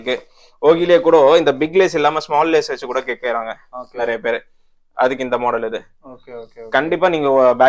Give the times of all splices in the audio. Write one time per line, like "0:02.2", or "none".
none

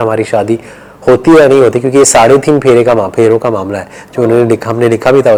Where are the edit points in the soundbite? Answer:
none

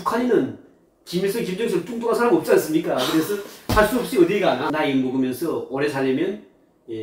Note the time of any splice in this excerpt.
0:04.7

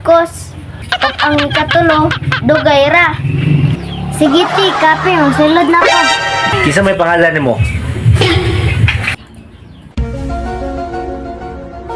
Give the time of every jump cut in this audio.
0:06.6

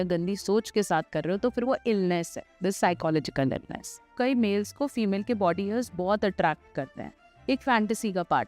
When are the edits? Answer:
0:04.1

